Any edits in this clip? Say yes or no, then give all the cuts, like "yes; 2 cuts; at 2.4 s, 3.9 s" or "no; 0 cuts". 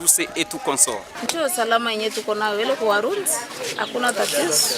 yes; 1 cut; at 1.2 s